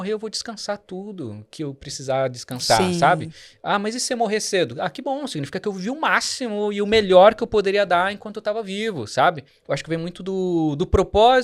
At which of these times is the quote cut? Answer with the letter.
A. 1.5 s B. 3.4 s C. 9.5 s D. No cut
C